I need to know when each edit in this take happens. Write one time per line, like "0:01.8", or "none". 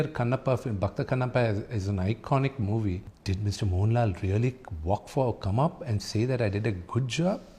0:03.1